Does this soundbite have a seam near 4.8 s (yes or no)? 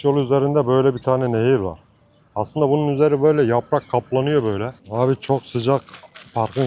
yes